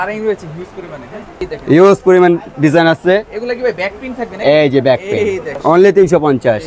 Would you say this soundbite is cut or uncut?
cut